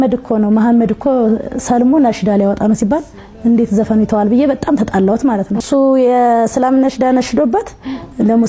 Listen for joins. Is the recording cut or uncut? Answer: cut